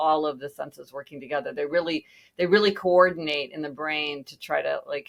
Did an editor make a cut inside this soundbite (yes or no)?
no